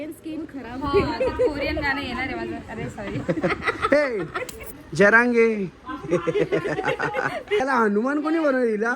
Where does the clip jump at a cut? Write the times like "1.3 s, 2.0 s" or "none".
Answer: 4.5 s, 7.6 s